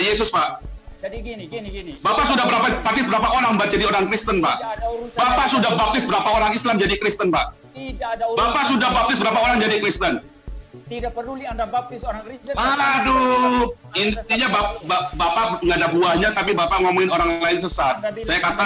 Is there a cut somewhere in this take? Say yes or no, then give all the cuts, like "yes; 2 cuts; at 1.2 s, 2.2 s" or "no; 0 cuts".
no; 0 cuts